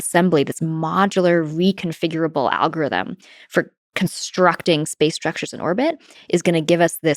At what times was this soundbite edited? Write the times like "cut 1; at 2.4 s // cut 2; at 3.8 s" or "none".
none